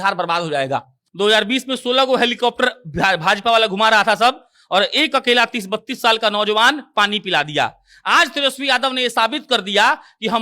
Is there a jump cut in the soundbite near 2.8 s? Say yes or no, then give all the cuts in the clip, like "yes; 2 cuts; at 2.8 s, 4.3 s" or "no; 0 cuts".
no; 1 cut; at 1.0 s